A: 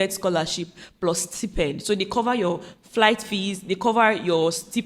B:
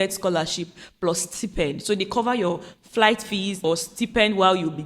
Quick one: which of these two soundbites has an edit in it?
B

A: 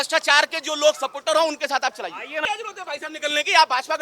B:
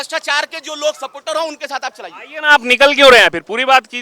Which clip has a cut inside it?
A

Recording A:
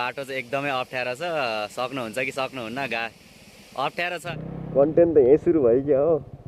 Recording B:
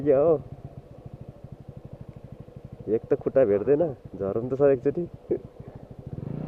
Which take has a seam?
A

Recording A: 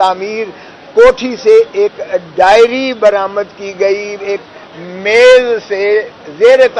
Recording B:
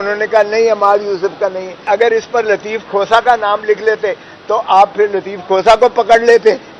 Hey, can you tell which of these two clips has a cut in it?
B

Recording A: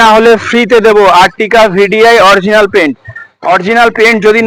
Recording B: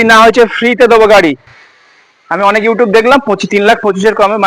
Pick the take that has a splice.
B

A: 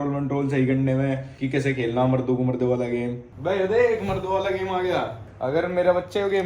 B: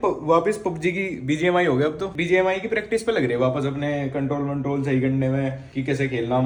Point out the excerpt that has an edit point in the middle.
A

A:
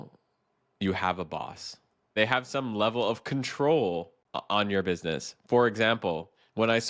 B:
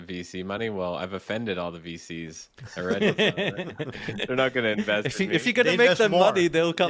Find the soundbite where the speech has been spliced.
A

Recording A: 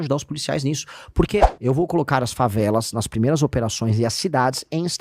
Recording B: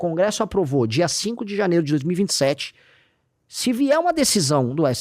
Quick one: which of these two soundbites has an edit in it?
A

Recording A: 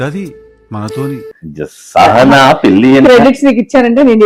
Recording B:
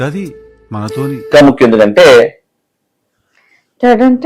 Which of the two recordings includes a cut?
B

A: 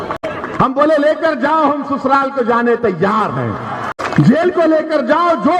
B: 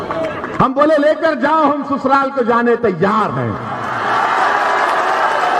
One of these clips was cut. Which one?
A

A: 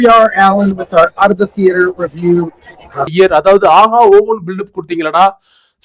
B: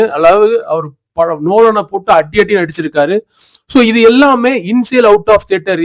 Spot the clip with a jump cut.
A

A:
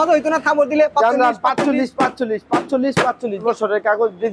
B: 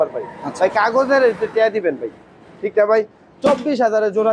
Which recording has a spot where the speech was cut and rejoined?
A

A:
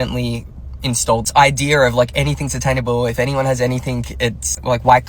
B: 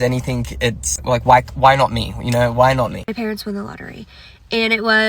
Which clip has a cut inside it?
B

